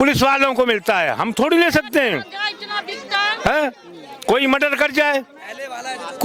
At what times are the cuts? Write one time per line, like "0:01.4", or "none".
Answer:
none